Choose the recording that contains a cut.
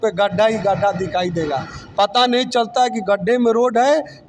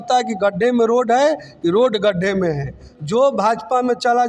second; 1 cut; at 2.9 s

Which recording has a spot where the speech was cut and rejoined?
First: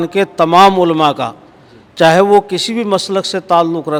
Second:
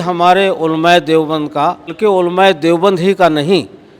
second; 1 cut; at 1.9 s

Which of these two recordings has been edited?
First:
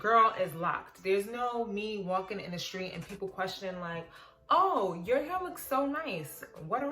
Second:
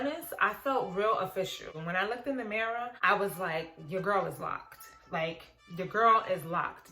second; 2 cuts; at 1.7 s, 3.0 s

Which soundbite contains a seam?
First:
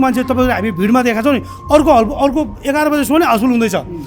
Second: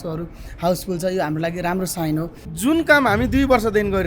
second; 1 cut; at 2.4 s

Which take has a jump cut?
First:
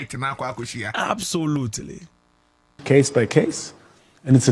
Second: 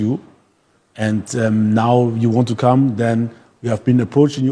first; 1 cut; at 2.8 s

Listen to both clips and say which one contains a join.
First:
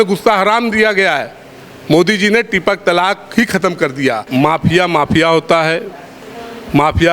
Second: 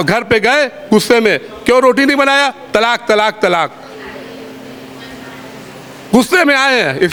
first; 1 cut; at 4.2 s

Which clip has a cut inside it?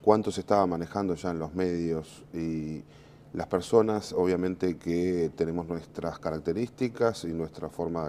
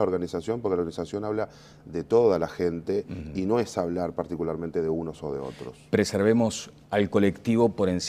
second; 1 cut; at 5.3 s

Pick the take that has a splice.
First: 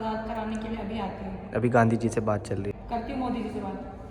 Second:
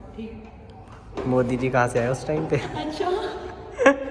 first; 1 cut; at 2.7 s

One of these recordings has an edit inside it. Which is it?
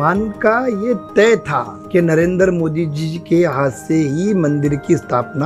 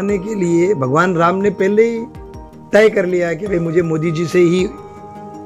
first; 1 cut; at 1.8 s

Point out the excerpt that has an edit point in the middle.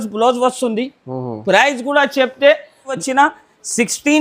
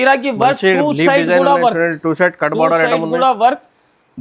first; 1 cut; at 3.0 s

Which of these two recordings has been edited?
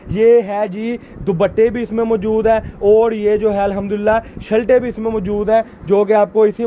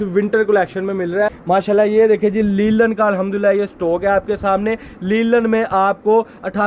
second; 1 cut; at 1.4 s

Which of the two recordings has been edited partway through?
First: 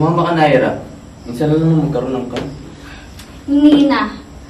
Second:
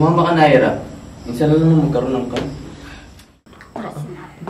second; 1 cut; at 3.3 s

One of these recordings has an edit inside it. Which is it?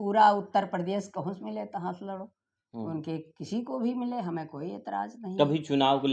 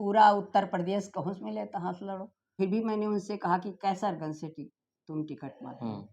second; 1 cut; at 2.5 s

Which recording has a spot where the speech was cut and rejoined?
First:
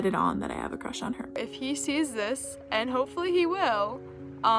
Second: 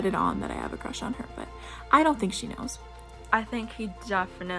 first; 1 cut; at 1.3 s

